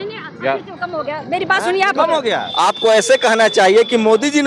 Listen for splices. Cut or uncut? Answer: cut